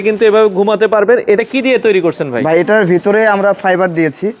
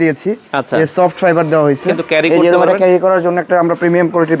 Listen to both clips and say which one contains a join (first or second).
second